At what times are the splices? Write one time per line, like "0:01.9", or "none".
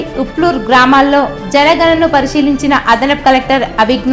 none